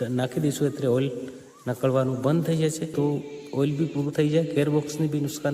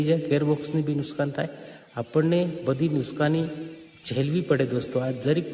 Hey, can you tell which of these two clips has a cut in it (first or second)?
first